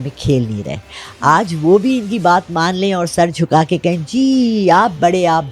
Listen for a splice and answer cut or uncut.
uncut